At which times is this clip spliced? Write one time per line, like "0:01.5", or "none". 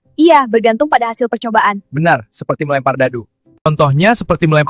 0:03.5